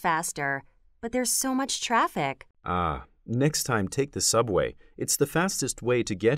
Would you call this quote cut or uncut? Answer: cut